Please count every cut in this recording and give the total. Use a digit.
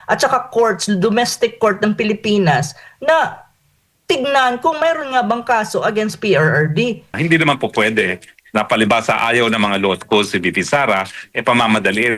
1